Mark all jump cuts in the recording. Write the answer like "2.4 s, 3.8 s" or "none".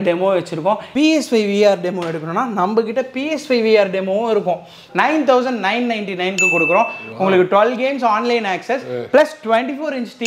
0.9 s, 4.8 s